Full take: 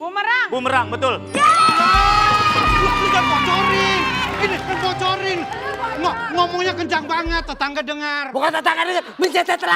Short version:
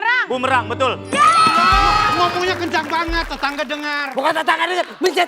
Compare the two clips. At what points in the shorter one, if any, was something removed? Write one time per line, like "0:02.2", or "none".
0:02.1